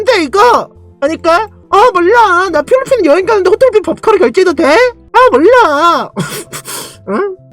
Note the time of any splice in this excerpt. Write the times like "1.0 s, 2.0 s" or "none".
5.0 s